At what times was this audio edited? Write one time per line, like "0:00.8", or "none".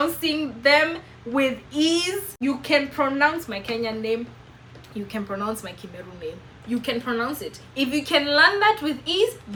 none